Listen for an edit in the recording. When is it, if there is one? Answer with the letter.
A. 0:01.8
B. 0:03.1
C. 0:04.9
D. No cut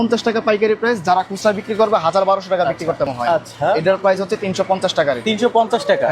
B